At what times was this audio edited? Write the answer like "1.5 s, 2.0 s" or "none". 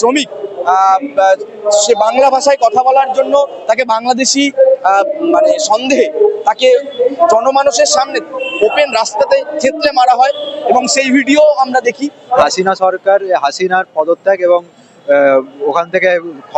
12.5 s